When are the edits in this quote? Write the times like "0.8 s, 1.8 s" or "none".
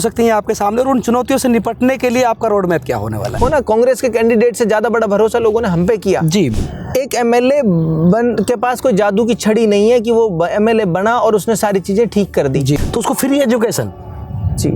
3.4 s, 6.6 s, 12.8 s